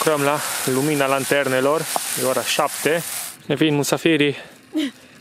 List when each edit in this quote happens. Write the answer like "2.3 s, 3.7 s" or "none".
3.3 s